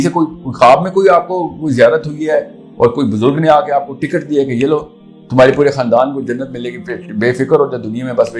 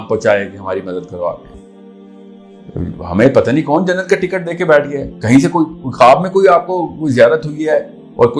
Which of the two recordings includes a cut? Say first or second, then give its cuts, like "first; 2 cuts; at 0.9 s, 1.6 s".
second; 1 cut; at 1.5 s